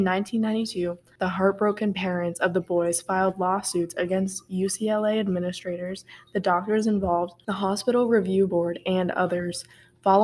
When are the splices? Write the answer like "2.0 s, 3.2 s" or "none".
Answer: 1.1 s, 7.4 s